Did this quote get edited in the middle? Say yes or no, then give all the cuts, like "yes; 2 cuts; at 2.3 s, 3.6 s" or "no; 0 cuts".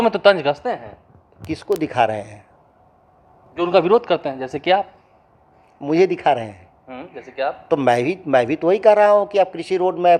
no; 0 cuts